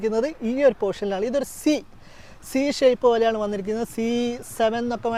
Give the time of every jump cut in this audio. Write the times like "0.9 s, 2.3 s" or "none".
none